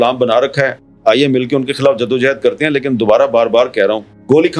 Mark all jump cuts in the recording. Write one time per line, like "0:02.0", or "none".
none